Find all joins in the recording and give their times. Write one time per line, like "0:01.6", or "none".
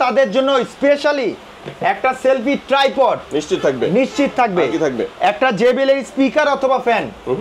none